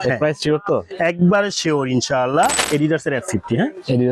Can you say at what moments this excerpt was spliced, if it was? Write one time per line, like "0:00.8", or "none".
0:02.5